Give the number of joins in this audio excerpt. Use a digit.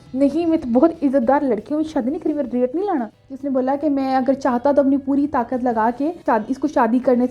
2